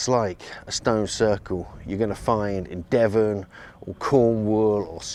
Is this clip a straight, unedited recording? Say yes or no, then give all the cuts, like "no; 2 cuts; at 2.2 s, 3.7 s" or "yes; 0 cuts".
yes; 0 cuts